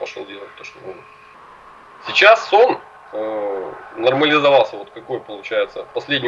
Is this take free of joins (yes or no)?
no